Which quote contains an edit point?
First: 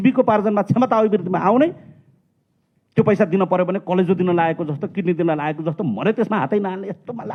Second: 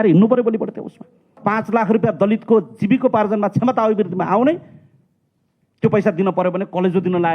second; 1 cut; at 1.4 s

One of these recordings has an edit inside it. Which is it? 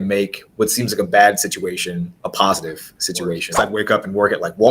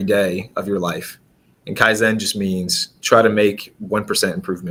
first; 2 cuts; at 2.2 s, 3.5 s

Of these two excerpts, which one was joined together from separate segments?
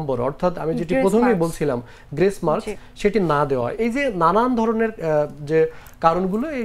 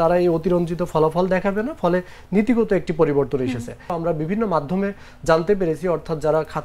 second; 1 cut; at 3.9 s

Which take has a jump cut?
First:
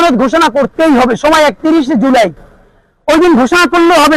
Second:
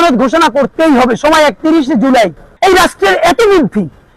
second; 1 cut; at 2.4 s

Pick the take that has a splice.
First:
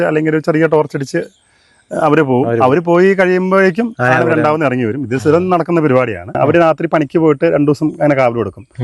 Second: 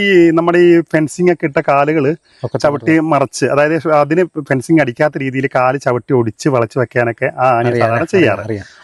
first; 1 cut; at 6.3 s

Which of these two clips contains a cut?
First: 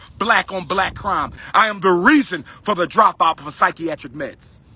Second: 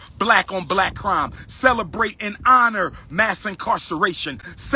first; 1 cut; at 1.4 s

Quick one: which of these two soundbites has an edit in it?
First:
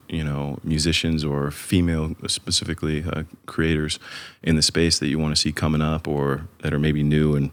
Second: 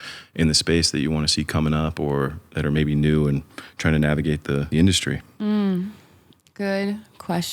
second; 1 cut; at 4.7 s

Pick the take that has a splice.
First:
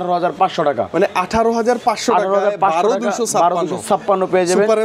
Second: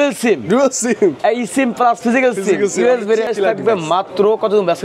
second; 1 cut; at 3.3 s

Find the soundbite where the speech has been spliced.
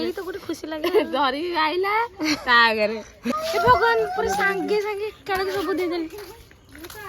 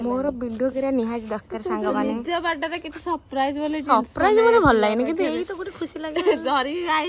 first; 1 cut; at 3.3 s

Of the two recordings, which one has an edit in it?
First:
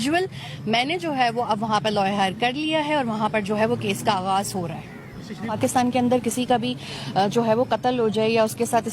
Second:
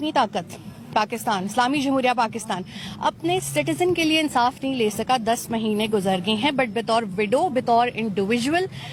first; 1 cut; at 5.6 s

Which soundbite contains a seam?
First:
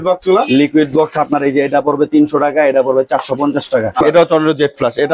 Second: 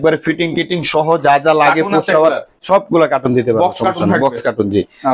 first; 1 cut; at 3.9 s

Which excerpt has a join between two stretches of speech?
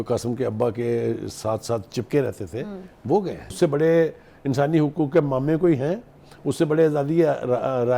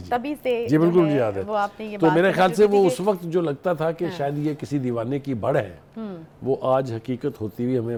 first; 1 cut; at 3.6 s

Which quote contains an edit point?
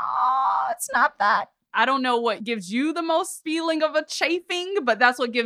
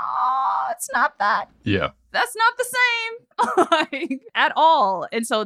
first; 1 cut; at 1.6 s

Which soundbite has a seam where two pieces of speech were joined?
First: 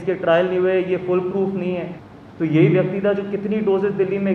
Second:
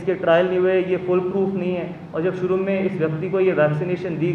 first; 1 cut; at 2.0 s

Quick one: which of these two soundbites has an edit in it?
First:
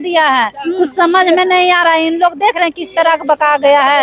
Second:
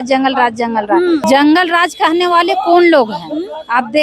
second; 1 cut; at 1.2 s

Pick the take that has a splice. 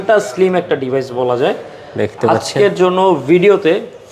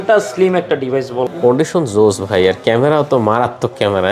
second; 1 cut; at 1.3 s

